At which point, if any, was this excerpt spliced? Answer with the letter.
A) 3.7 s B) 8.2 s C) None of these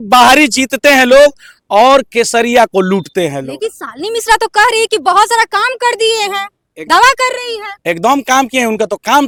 C